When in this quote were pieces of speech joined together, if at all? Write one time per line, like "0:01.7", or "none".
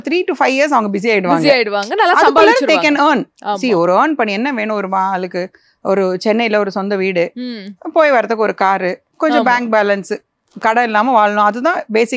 none